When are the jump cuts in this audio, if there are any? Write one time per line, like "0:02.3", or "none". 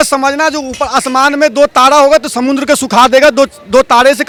none